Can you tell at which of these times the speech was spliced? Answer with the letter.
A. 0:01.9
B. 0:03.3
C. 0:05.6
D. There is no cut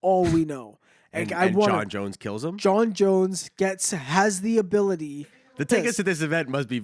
C